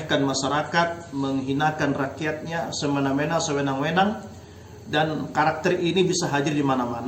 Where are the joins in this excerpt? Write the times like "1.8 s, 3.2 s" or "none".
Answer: none